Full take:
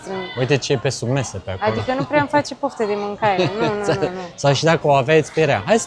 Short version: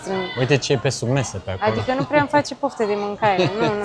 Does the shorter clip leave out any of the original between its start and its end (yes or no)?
no